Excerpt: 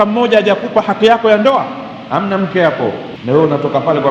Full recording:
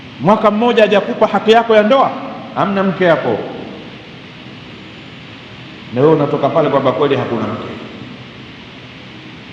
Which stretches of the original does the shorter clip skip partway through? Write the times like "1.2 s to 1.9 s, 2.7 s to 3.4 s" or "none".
3.5 s to 5.8 s